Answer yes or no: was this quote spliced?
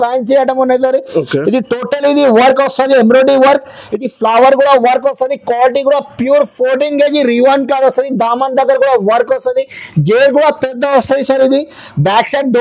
no